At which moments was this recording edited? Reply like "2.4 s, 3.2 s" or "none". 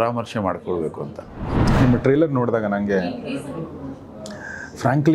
1.6 s